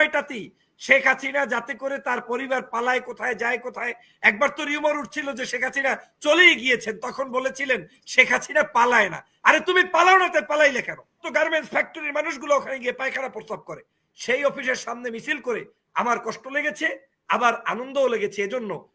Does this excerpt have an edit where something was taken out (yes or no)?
yes